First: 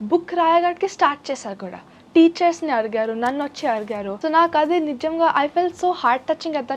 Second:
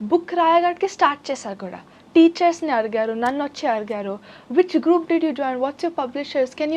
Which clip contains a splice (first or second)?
first